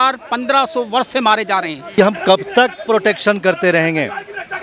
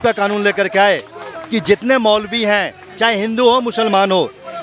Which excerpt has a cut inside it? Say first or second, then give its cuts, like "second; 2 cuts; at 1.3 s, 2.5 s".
first; 1 cut; at 1.8 s